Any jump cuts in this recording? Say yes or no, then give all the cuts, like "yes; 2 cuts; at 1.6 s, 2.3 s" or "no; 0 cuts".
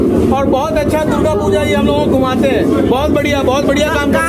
no; 0 cuts